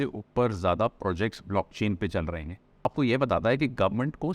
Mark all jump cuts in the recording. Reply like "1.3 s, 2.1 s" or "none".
2.9 s